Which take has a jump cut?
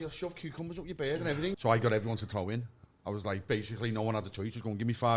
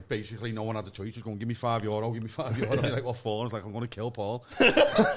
first; 1 cut; at 1.6 s

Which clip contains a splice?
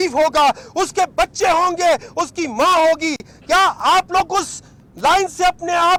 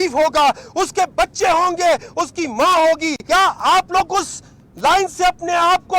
second; 1 cut; at 3.1 s

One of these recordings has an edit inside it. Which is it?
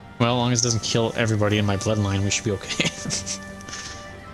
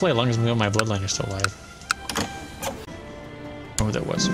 second; 1 cut; at 2.9 s

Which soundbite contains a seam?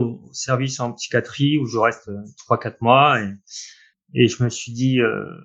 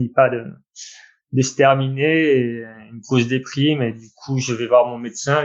first; 1 cut; at 3.6 s

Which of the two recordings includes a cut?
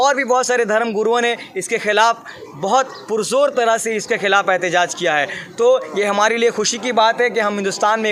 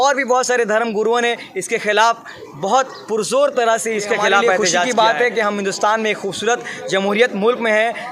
second; 1 cut; at 4.9 s

